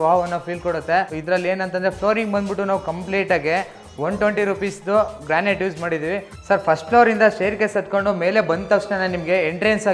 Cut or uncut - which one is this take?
cut